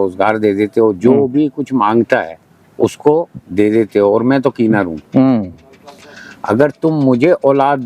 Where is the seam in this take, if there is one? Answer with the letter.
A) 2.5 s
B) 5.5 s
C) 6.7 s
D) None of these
D